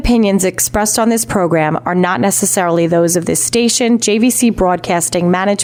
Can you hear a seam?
no; 0 cuts

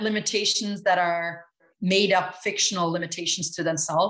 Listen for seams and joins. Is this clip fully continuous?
no; 1 cut; at 1.7 s

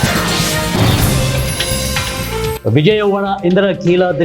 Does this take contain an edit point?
yes; 1 cut; at 2.6 s

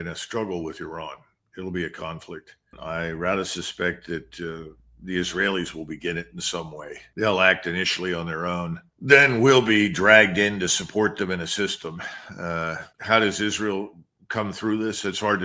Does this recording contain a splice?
yes; 1 cut; at 2.8 s

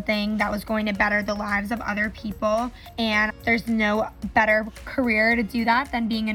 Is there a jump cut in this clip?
yes; 1 cut; at 3.1 s

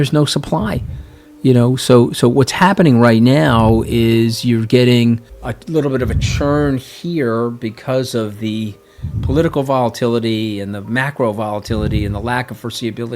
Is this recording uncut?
yes; 0 cuts

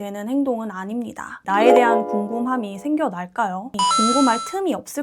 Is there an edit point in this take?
yes; 2 cuts; at 1.4 s, 3.7 s

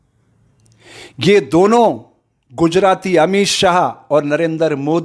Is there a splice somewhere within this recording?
no; 0 cuts

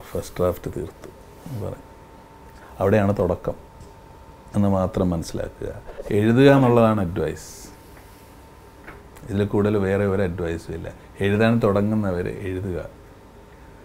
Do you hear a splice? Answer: yes; 1 cut; at 5.9 s

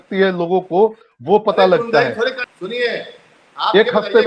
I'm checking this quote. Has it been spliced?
yes; 1 cut; at 2.4 s

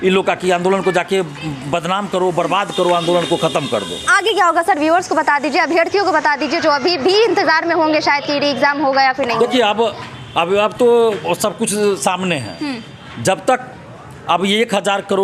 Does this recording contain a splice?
no; 0 cuts

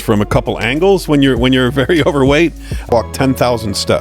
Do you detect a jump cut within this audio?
yes; 1 cut; at 2.9 s

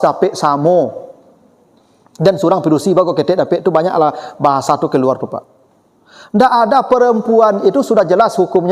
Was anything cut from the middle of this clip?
no; 0 cuts

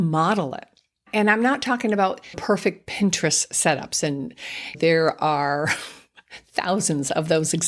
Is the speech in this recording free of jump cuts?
no; 3 cuts; at 1.0 s, 2.4 s, 4.8 s

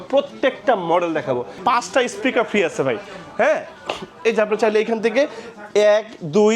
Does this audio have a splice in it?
yes; 1 cut; at 1.6 s

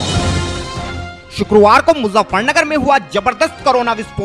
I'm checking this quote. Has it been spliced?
yes; 1 cut; at 1.2 s

